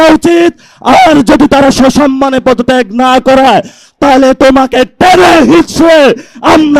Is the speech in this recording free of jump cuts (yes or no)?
yes